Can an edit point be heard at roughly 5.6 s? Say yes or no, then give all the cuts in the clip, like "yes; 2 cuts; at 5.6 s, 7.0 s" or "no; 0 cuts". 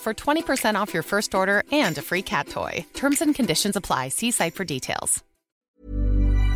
yes; 1 cut; at 5.6 s